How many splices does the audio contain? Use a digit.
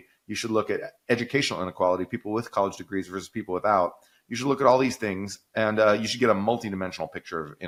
0